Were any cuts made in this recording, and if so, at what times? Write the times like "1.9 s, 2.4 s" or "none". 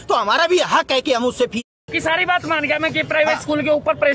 1.7 s